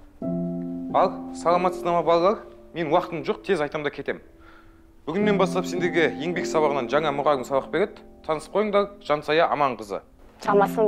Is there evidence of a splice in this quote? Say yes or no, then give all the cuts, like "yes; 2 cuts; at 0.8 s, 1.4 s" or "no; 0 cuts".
yes; 1 cut; at 0.9 s